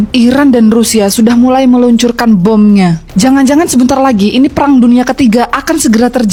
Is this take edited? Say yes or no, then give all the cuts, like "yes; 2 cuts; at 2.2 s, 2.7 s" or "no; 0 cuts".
no; 0 cuts